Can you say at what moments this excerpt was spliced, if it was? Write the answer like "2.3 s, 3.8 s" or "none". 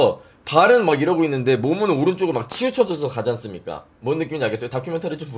none